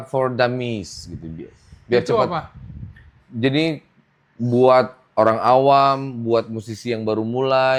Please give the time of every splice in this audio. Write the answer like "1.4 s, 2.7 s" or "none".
none

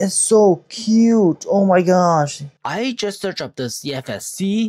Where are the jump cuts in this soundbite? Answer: 2.5 s

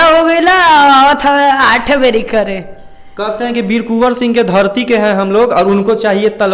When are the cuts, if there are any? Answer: none

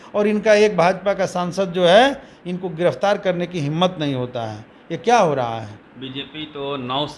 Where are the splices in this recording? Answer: 5.8 s

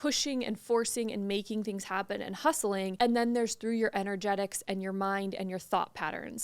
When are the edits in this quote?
2.9 s

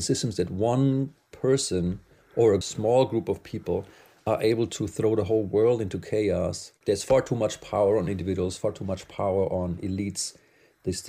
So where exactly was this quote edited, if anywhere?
2.6 s, 6.7 s, 8.6 s

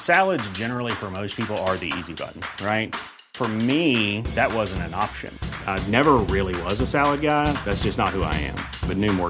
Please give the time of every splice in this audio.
none

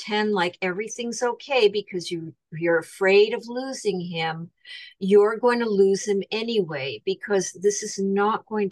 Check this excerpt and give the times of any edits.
none

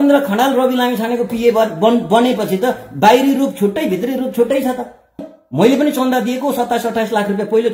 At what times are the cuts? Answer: 5.2 s

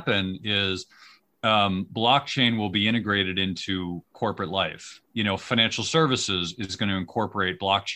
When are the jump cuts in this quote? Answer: 5.0 s

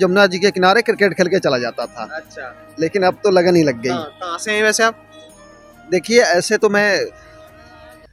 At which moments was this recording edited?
none

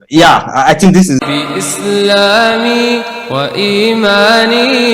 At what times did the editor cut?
1.2 s

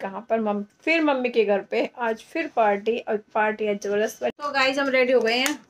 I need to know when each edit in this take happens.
4.4 s

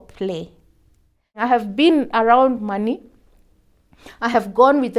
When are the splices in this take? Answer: 1.3 s

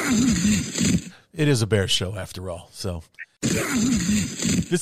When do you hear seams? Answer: none

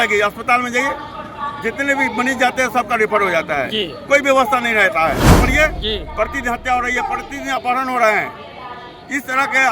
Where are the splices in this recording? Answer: 5.3 s

